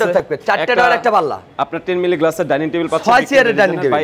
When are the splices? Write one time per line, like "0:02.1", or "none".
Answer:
none

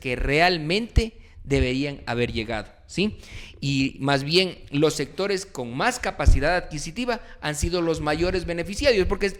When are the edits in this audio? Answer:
none

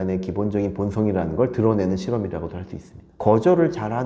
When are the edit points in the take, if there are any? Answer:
0:03.1

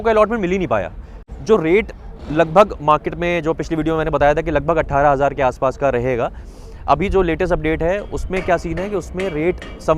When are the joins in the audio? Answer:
0:01.3

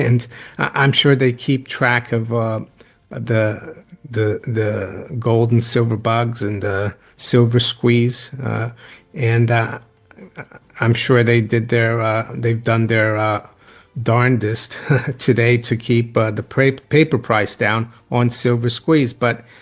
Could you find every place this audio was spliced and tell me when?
none

